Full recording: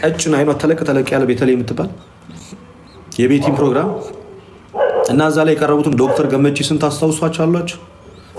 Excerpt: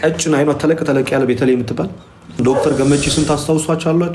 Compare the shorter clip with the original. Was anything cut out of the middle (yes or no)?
yes